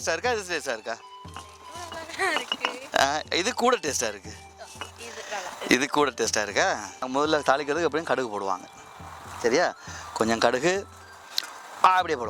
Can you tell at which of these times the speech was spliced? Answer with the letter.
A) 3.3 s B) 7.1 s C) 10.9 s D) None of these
B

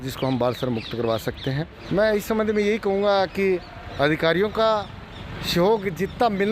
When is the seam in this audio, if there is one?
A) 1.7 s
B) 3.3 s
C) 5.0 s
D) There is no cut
A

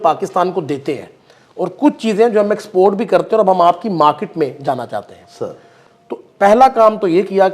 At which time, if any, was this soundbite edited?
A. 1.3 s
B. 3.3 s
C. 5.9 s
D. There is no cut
D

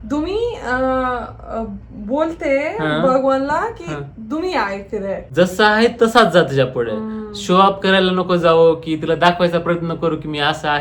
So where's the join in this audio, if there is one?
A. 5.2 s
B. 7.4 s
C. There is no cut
A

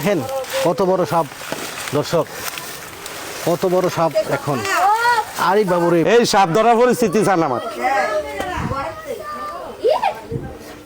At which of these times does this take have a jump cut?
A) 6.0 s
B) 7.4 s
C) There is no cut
A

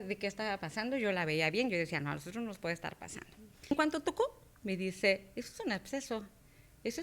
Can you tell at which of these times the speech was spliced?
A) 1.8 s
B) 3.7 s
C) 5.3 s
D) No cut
B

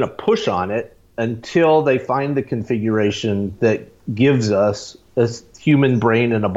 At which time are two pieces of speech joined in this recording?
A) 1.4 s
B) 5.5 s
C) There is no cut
B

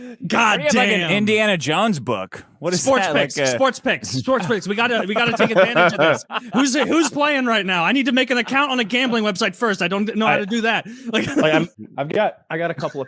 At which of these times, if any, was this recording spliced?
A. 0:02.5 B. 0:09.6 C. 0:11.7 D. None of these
C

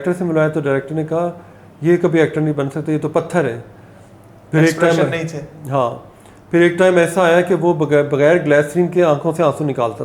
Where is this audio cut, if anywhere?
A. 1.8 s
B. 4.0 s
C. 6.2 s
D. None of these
D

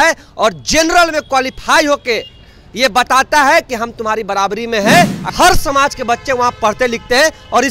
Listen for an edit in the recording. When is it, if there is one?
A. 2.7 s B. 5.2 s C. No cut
B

